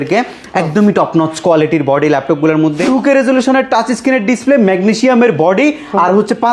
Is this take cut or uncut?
cut